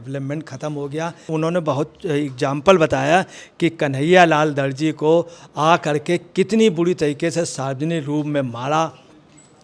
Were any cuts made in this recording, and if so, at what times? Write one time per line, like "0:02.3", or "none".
0:01.3